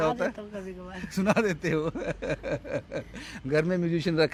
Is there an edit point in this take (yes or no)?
no